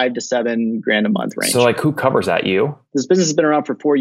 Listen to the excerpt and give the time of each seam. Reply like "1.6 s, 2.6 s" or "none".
2.8 s